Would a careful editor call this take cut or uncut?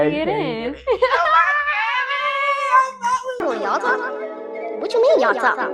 cut